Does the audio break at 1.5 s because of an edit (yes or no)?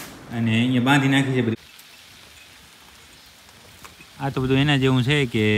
yes